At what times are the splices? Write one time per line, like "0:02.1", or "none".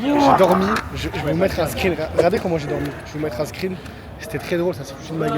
none